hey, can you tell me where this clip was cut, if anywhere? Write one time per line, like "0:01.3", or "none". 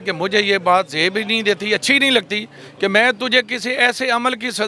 none